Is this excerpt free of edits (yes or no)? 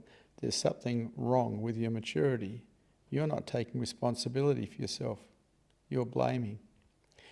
yes